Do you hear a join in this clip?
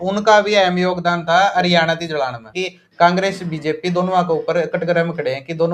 yes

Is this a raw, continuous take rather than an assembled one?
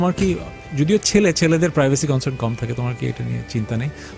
yes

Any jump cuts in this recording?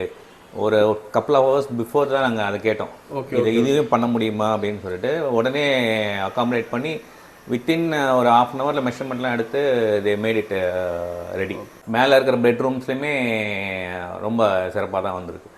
yes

